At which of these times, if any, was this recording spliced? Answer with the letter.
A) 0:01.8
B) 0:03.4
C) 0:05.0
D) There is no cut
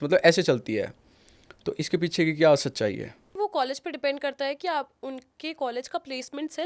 B